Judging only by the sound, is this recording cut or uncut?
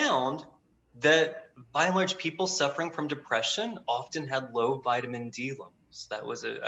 uncut